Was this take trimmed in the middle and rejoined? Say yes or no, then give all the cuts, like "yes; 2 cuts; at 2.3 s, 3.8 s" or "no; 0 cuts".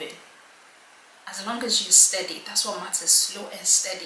no; 0 cuts